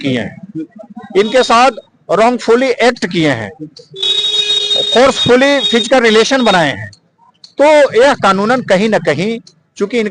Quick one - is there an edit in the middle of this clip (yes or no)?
no